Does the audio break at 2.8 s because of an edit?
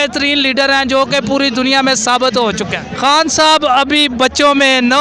yes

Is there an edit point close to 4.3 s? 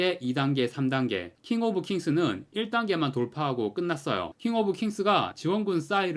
yes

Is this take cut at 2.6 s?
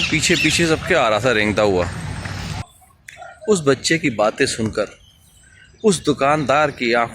yes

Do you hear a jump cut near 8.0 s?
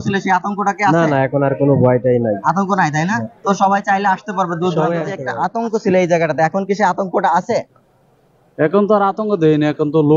no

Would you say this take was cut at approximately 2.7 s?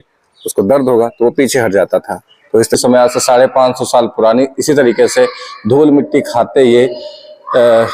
yes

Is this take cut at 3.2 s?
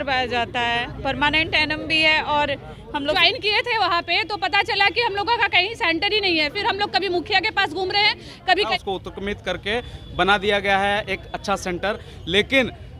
yes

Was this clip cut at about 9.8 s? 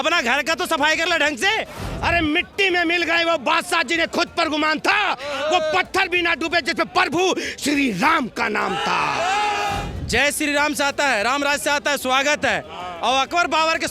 yes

